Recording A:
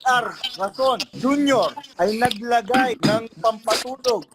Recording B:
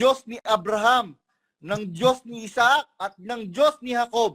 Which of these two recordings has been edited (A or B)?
A